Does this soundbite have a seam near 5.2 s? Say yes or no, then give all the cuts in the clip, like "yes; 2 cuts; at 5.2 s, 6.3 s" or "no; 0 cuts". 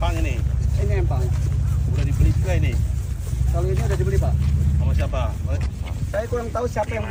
no; 0 cuts